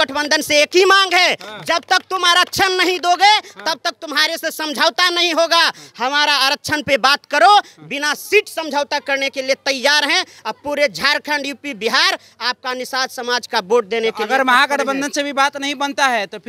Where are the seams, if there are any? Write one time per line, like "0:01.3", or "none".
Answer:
none